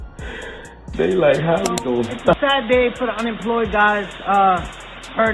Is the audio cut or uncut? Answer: cut